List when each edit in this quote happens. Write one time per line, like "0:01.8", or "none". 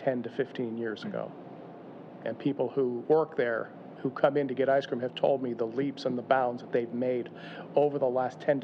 0:02.1
0:03.0